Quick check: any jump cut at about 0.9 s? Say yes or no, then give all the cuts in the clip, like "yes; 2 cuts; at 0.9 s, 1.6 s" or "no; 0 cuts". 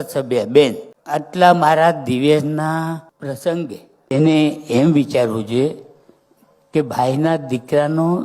yes; 2 cuts; at 0.9 s, 3.1 s